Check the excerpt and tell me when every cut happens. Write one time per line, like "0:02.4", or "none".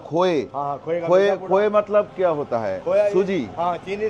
none